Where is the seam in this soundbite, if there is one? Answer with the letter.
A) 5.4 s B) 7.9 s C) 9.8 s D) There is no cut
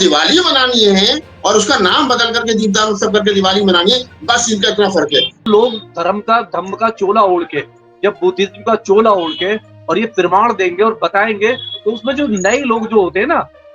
A